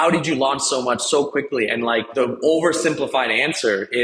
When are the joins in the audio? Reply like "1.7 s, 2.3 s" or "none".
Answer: 2.1 s